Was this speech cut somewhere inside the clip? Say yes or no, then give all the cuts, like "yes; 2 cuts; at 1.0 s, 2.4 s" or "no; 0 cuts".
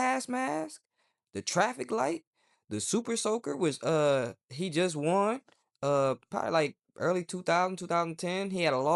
no; 0 cuts